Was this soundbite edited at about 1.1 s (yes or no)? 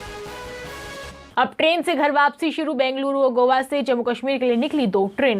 yes